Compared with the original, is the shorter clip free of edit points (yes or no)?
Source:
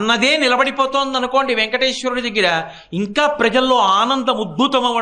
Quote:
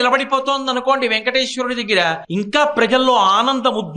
no